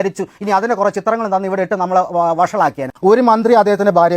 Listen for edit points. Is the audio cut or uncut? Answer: cut